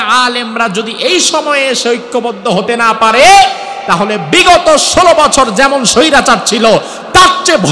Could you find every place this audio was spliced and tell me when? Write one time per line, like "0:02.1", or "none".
none